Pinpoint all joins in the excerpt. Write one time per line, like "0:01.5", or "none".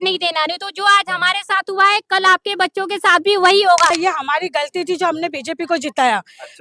0:03.9